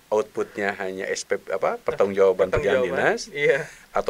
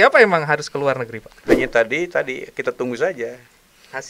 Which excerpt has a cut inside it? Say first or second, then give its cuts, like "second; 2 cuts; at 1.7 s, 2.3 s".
second; 1 cut; at 1.3 s